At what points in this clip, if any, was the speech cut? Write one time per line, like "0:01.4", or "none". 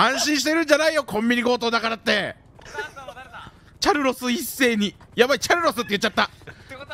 0:02.5
0:05.0